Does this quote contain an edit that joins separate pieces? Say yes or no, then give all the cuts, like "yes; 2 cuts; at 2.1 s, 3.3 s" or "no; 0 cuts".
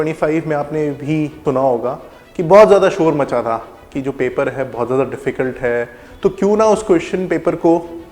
yes; 2 cuts; at 1.4 s, 6.0 s